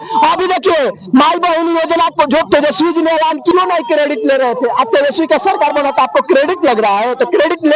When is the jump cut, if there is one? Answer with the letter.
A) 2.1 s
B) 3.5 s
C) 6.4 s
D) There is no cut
B